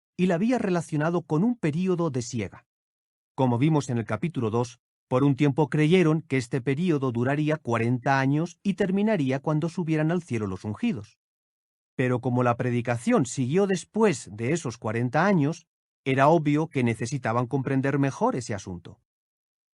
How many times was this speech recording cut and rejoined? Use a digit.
1